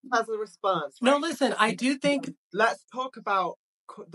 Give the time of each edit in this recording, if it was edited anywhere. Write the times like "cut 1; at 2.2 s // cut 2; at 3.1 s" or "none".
cut 1; at 2.3 s